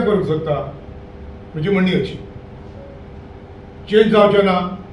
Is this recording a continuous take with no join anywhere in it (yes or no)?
yes